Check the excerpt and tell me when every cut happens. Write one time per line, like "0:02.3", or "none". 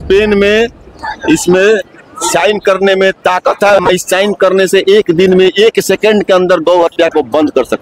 none

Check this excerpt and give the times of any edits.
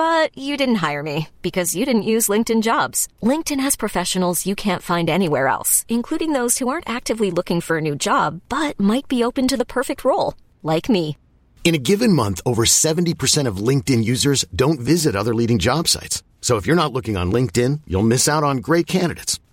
none

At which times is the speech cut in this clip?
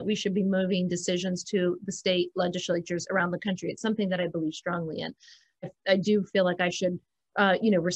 0:05.7

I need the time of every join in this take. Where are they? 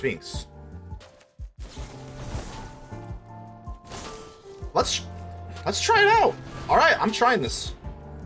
0:01.0

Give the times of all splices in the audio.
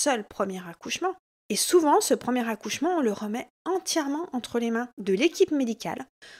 none

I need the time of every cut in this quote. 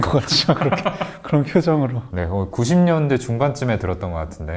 none

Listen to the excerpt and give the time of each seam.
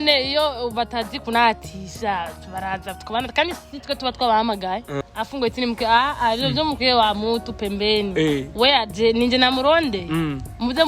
0:05.0

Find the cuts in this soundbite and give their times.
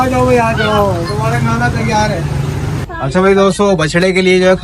0:02.8

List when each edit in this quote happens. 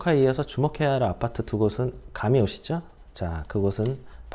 none

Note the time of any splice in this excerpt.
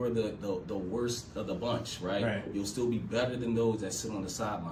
none

